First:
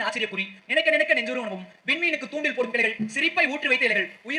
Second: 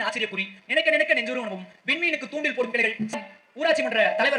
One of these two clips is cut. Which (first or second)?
second